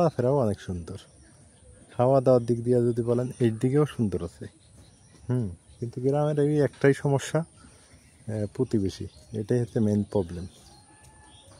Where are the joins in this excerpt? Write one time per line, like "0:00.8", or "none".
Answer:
none